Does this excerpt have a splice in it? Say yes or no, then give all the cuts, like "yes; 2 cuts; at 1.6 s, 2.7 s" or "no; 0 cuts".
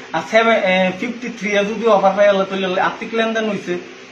no; 0 cuts